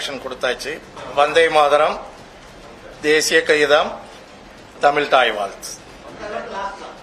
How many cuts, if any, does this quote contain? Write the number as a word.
two